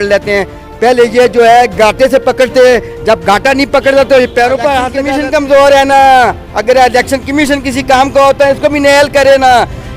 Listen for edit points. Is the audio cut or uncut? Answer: cut